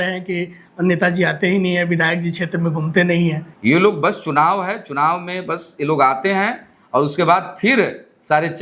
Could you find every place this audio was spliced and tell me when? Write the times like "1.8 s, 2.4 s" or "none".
3.5 s